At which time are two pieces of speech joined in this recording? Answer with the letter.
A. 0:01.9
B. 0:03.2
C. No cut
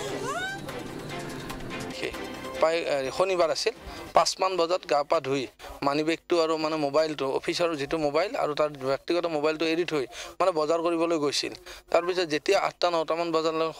A